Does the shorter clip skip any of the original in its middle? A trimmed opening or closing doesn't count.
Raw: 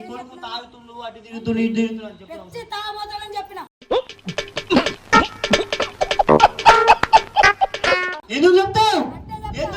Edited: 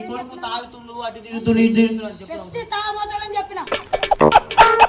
yes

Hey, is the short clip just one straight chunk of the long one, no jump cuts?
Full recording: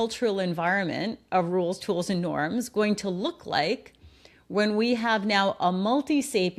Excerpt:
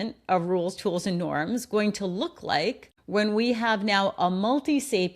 no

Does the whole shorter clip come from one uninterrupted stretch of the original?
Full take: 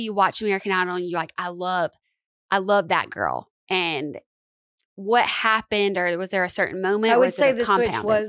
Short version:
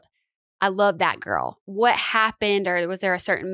no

